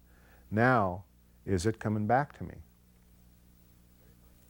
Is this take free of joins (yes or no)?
yes